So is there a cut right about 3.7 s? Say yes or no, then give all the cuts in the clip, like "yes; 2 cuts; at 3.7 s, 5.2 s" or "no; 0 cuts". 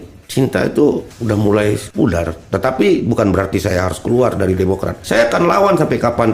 no; 3 cuts; at 1.1 s, 1.9 s, 5.0 s